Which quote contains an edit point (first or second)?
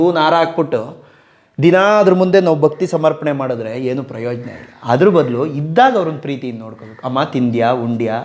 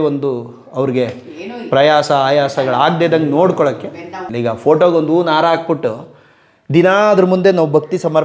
second